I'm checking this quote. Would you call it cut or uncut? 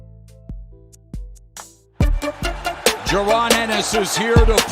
cut